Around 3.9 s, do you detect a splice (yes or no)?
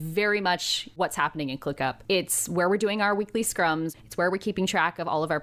yes